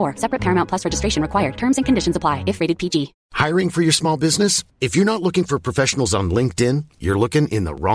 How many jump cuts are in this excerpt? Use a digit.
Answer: 1